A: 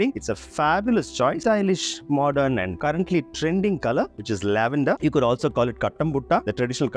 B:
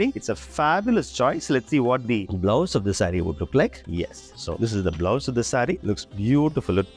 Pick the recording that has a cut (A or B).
A